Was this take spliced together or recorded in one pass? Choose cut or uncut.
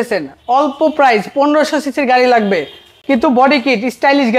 uncut